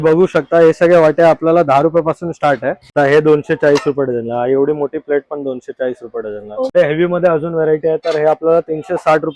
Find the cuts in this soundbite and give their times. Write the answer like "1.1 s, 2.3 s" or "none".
2.8 s, 6.7 s